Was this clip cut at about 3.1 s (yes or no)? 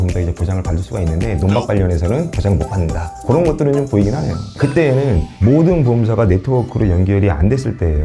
no